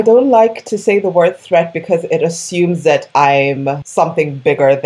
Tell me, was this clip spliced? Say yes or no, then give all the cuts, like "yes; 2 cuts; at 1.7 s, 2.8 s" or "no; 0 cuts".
yes; 1 cut; at 3.8 s